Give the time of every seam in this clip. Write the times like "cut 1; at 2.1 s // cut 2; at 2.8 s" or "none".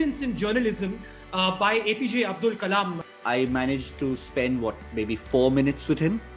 cut 1; at 3.0 s